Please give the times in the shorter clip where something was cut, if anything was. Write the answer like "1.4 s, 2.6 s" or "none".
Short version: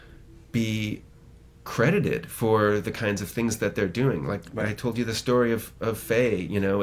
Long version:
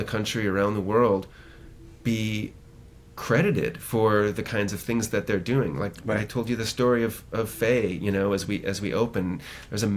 none